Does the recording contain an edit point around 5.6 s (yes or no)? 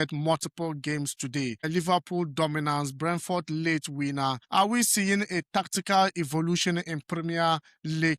no